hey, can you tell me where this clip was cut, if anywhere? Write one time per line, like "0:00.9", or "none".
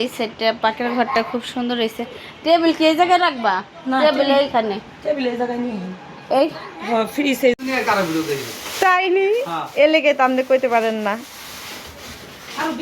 0:07.5

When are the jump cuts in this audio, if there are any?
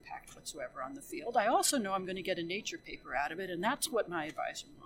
none

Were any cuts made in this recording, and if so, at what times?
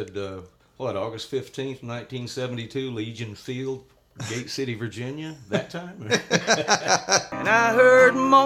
0:07.3

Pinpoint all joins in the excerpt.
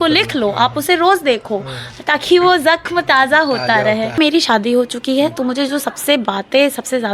0:04.2

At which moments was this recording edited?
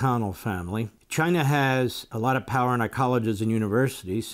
0:01.0
0:02.1

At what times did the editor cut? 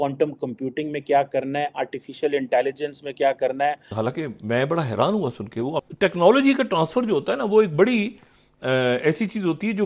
0:03.9
0:05.8

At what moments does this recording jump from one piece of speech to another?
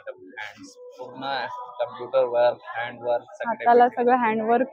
none

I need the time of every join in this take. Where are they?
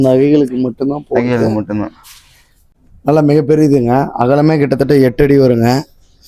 none

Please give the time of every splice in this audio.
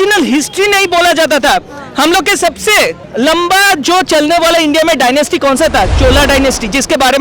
0:03.0

